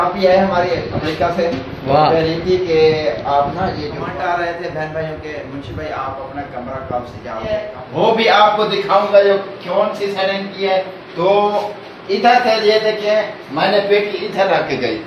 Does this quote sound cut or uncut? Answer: cut